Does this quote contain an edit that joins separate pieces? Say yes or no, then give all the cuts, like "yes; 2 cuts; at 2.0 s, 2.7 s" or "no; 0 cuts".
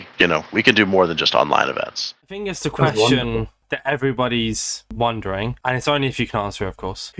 yes; 1 cut; at 2.1 s